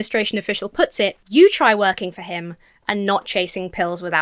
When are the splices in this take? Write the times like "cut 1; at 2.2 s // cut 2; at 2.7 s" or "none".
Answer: cut 1; at 1.2 s